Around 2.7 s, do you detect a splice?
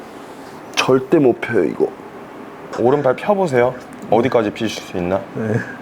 yes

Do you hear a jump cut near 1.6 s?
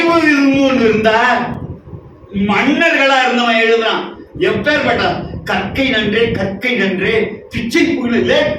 no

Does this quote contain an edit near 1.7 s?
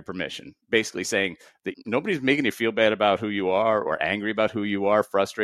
yes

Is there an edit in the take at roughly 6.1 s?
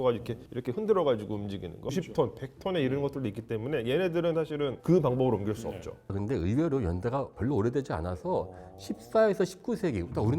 yes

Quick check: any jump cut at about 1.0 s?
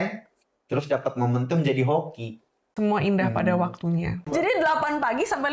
no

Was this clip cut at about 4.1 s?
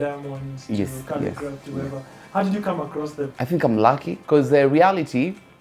yes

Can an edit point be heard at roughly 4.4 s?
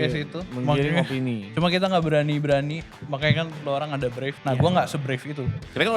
yes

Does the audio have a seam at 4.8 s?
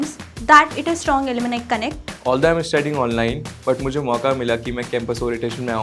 no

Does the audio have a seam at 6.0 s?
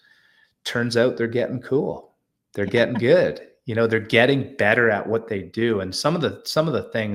no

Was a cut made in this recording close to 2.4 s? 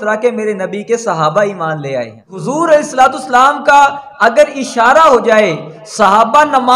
yes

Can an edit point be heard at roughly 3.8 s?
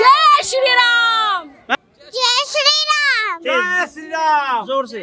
no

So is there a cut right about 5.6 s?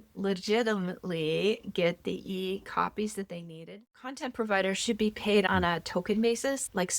no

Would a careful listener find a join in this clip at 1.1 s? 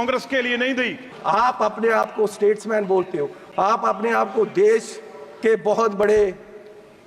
yes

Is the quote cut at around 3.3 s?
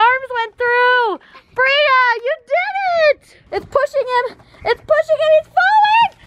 yes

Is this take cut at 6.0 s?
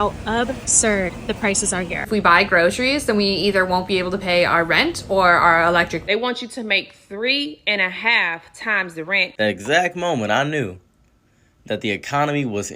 yes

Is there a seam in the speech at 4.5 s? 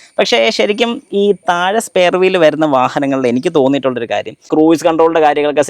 yes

